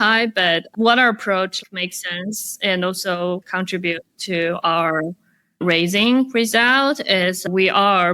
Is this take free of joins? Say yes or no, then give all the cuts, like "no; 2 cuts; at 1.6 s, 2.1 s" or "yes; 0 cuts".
no; 2 cuts; at 1.6 s, 3.5 s